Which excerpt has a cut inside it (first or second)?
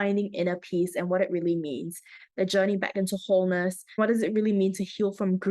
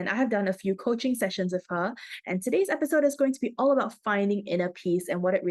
first